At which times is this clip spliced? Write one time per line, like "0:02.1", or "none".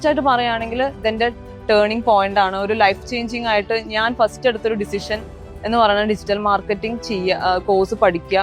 none